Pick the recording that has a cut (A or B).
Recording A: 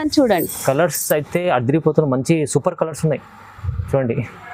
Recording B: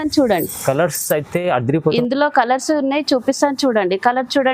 B